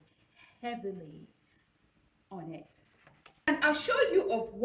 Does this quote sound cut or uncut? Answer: cut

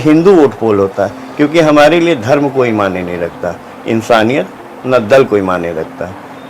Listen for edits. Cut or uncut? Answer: uncut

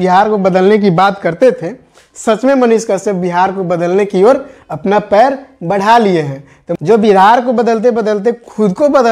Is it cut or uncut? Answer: cut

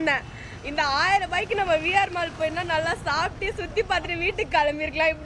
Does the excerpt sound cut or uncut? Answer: uncut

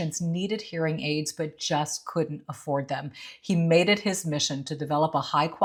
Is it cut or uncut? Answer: uncut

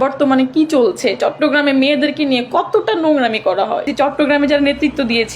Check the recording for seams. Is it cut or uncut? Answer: cut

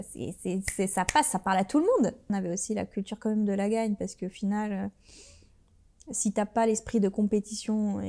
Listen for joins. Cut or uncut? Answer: cut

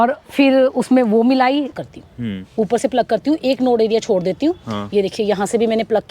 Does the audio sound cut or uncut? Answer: cut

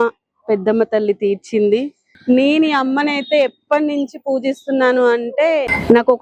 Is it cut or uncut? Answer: cut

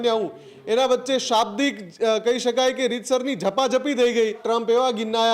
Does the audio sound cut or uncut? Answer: cut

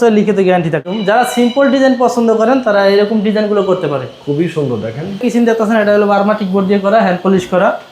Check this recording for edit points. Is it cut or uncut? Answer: cut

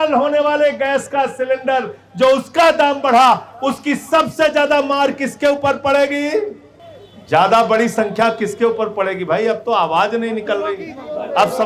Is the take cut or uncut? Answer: uncut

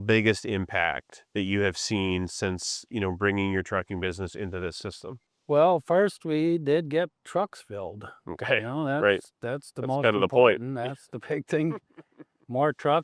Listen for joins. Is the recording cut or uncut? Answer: uncut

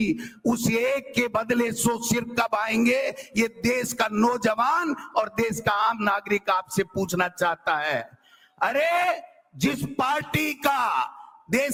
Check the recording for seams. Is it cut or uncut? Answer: uncut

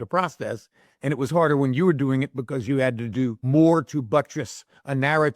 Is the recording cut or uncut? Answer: cut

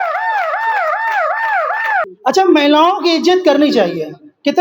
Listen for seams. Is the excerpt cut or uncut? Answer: cut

